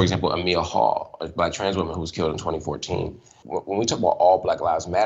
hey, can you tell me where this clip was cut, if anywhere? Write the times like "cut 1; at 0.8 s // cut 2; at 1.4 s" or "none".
cut 1; at 3.4 s